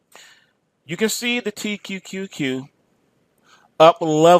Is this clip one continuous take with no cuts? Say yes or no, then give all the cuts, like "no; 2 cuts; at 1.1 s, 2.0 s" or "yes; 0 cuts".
yes; 0 cuts